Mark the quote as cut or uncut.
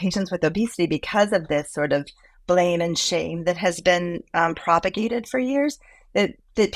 uncut